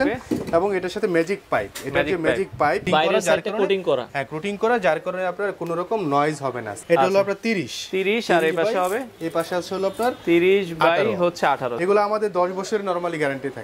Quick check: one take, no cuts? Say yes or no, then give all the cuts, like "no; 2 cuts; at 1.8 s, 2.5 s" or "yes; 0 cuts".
no; 3 cuts; at 2.8 s, 6.7 s, 11.7 s